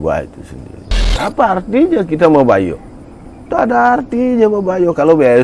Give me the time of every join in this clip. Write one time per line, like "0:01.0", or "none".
0:01.1